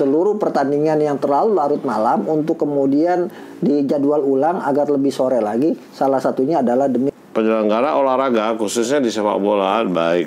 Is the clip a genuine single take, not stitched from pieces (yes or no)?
no